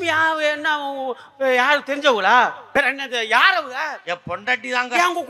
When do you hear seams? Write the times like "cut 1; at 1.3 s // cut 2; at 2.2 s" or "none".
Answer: cut 1; at 2.7 s

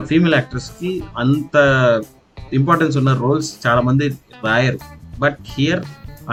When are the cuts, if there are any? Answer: none

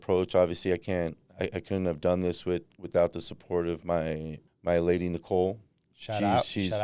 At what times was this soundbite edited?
none

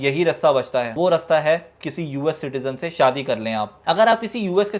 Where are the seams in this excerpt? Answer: none

